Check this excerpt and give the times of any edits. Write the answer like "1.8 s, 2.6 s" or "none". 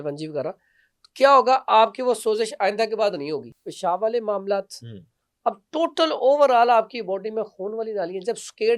3.5 s